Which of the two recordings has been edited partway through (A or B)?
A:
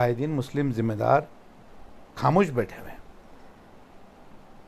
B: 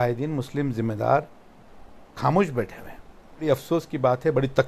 B